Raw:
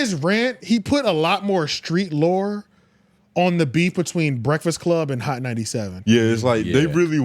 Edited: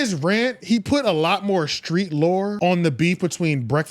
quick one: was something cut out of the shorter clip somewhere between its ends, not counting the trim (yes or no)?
yes